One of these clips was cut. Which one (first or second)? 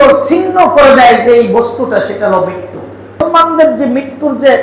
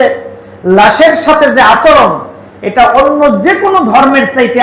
first